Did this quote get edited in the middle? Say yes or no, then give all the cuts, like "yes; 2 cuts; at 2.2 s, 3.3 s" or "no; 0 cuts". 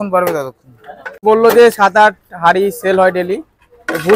yes; 1 cut; at 1.2 s